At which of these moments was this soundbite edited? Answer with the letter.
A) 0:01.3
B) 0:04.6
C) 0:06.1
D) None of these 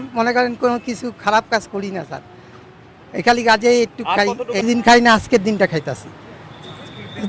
B